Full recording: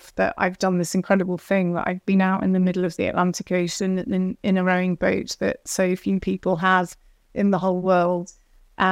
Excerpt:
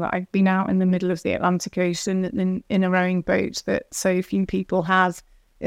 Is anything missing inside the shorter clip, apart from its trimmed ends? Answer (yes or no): no